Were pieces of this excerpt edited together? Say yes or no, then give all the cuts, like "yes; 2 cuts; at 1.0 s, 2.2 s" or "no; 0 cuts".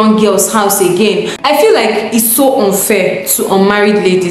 yes; 1 cut; at 1.3 s